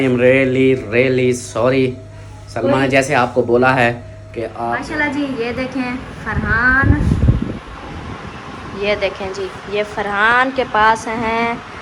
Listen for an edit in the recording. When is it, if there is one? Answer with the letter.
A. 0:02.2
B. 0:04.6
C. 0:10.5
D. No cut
B